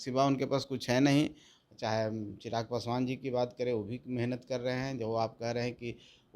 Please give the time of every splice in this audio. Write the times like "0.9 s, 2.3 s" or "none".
1.7 s